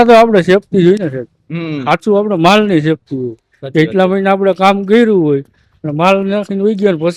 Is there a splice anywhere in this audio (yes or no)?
no